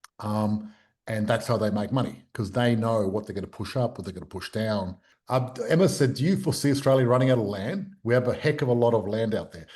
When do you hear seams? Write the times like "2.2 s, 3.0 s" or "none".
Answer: 5.1 s